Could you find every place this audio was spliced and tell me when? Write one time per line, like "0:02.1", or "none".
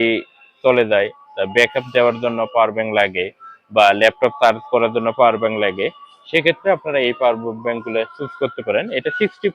none